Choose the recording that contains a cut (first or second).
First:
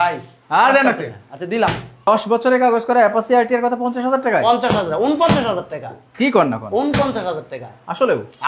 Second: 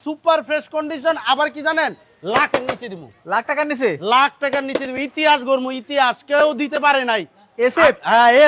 first